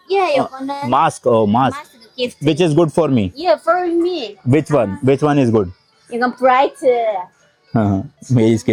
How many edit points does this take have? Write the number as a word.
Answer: zero